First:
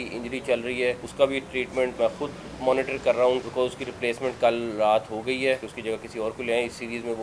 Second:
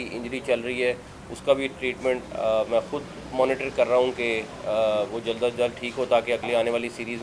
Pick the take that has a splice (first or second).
first